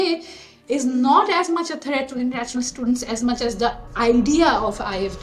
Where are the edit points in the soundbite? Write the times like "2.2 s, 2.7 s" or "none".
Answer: 3.9 s